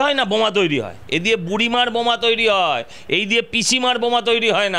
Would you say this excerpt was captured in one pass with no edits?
no; 1 cut; at 1.0 s

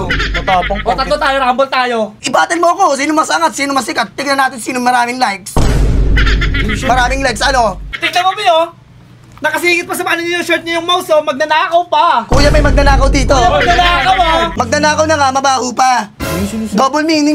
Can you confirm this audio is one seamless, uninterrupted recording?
no; 3 cuts; at 2.1 s, 7.9 s, 14.5 s

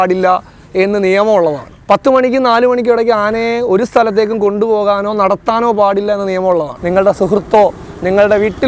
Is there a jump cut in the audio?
yes; 2 cuts; at 1.7 s, 6.8 s

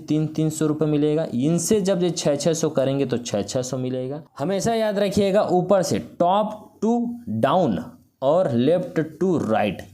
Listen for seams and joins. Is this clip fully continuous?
no; 1 cut; at 4.2 s

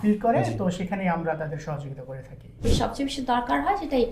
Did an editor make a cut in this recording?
yes; 1 cut; at 2.6 s

